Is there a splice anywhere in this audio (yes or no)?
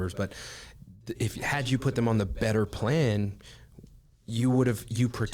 no